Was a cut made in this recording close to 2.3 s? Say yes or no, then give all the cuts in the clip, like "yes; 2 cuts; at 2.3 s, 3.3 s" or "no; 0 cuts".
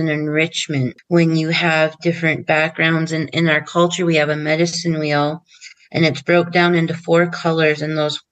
no; 1 cut; at 1.0 s